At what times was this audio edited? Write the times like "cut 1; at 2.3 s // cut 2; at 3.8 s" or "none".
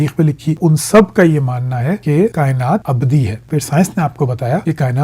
cut 1; at 3.4 s